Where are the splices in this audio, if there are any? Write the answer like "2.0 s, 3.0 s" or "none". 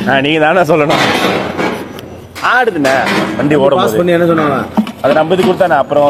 none